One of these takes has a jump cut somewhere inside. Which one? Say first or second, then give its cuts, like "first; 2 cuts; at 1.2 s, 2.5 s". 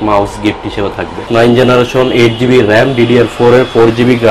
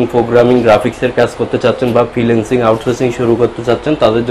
first; 1 cut; at 1.3 s